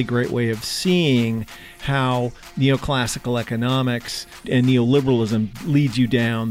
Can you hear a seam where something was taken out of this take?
no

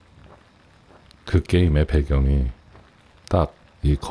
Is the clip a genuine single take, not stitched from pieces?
no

